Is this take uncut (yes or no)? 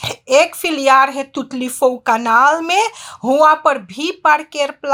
yes